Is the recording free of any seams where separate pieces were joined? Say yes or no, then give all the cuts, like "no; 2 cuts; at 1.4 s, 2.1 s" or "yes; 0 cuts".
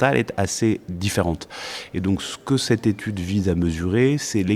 yes; 0 cuts